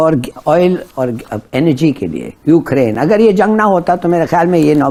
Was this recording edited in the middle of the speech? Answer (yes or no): no